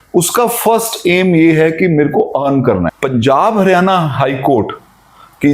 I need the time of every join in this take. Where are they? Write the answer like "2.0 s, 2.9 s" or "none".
2.9 s